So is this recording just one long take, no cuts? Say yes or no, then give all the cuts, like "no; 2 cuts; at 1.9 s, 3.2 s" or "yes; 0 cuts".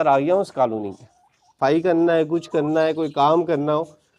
no; 1 cut; at 1.5 s